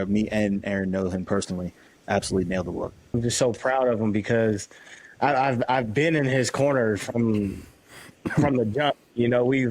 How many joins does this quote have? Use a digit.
1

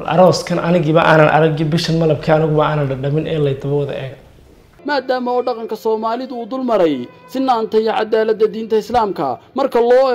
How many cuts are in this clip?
1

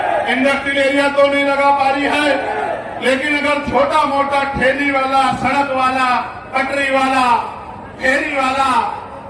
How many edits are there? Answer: 0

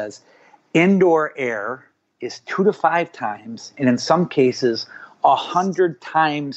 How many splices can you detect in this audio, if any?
0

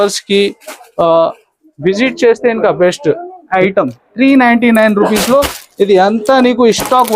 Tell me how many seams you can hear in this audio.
1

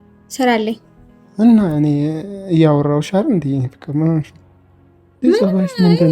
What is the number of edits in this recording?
0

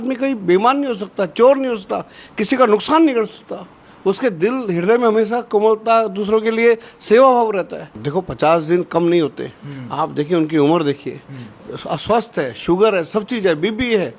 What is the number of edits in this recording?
1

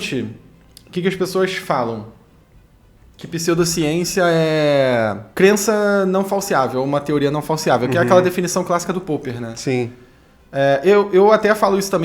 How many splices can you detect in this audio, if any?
1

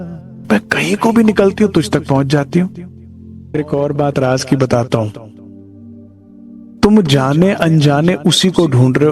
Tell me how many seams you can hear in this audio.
3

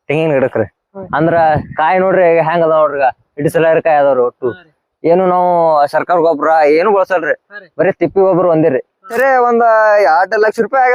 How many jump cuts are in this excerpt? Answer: 1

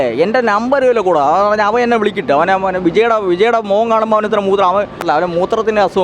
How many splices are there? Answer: 1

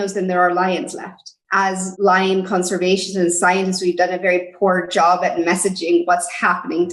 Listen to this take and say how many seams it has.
1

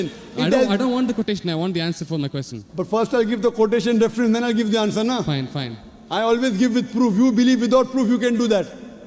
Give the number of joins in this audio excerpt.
0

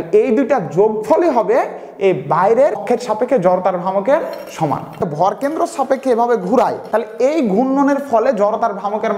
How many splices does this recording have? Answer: 3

